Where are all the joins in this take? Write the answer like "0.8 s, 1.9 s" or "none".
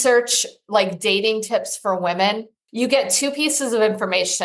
2.5 s